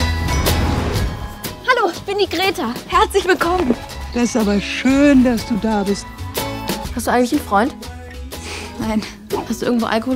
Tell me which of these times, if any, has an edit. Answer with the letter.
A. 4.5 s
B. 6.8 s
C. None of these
B